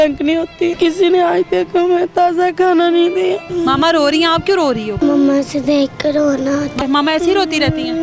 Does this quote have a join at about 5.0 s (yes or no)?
yes